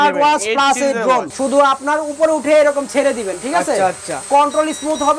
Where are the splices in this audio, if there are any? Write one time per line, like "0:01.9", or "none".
0:01.3